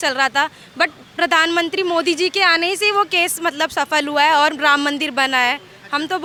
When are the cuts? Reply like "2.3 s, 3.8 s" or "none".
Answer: none

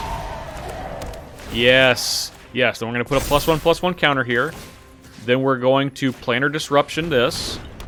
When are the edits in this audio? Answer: none

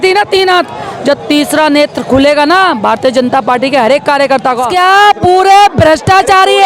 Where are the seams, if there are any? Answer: 4.7 s

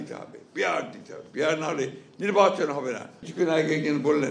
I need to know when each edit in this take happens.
3.2 s

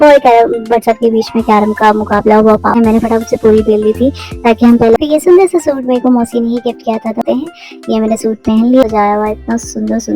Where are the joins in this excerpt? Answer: 2.8 s, 5.0 s, 7.2 s, 8.8 s

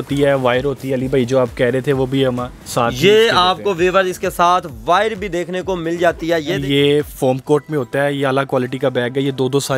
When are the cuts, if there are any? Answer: 6.6 s

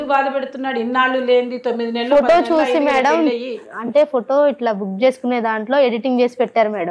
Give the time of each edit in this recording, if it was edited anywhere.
none

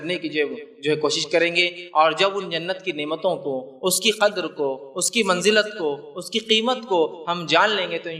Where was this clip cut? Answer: none

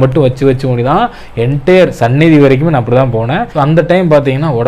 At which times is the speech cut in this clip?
3.5 s

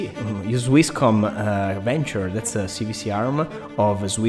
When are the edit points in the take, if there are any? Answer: none

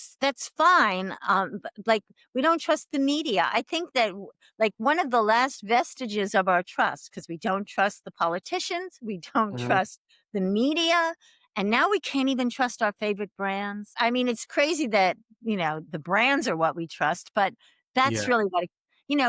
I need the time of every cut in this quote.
none

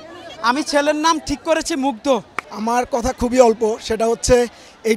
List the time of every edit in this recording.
2.4 s

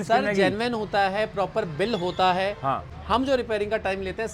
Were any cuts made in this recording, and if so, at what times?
2.9 s

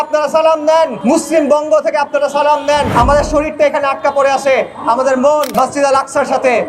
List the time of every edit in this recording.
1.0 s, 2.9 s, 5.5 s

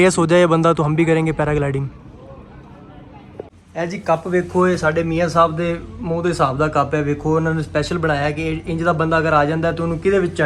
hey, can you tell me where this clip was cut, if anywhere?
3.6 s

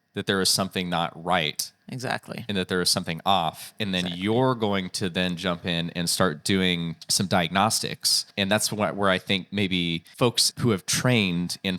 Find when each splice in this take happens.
7.0 s, 8.2 s, 10.5 s

